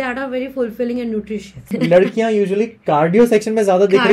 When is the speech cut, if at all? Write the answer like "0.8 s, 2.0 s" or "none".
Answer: 1.7 s